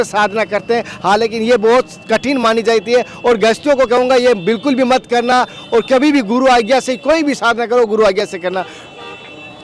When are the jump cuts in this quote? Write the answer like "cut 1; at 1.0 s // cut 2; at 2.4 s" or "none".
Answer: none